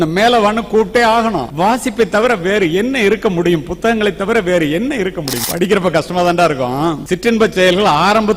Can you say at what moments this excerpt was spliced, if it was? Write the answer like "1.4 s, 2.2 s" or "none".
1.4 s, 5.4 s